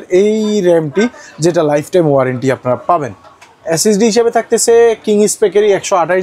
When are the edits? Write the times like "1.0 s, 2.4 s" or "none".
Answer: none